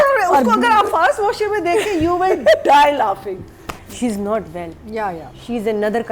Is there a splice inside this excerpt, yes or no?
yes